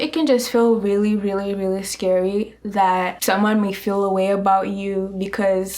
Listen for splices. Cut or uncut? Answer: cut